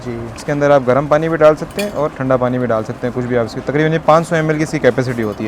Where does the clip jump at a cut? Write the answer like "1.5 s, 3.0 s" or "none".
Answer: none